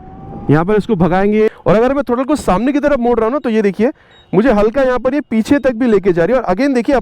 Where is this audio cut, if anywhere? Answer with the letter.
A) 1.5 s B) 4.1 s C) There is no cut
A